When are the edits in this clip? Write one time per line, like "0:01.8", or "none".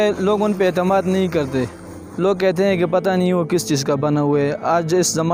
none